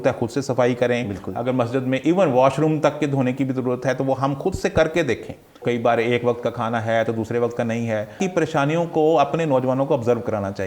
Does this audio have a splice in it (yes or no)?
yes